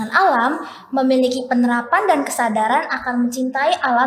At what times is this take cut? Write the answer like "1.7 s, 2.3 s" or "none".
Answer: none